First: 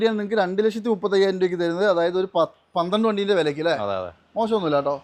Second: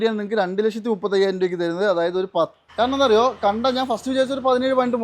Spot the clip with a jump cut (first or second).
second